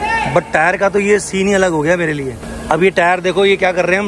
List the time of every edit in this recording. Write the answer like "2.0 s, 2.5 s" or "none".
2.4 s